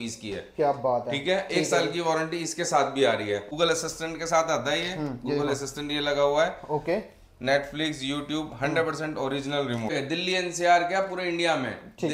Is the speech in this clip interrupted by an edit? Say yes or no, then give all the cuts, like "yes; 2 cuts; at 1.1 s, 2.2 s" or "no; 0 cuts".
yes; 2 cuts; at 3.5 s, 10.0 s